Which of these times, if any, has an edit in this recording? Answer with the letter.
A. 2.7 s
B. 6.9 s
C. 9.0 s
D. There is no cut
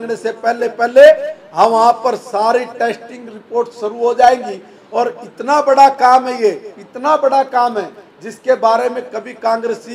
D